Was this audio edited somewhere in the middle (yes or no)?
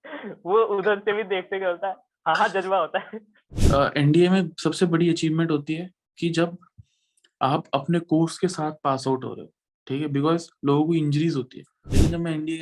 yes